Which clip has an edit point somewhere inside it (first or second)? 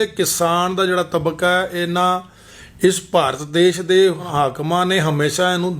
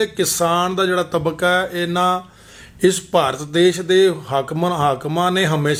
first